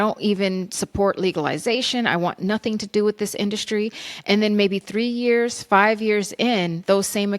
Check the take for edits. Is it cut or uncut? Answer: uncut